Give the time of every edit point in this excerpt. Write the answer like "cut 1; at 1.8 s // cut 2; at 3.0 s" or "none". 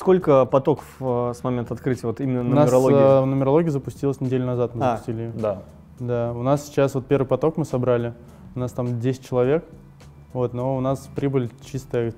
none